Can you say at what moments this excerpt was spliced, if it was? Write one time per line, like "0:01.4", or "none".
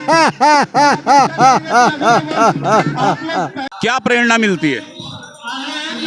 0:03.6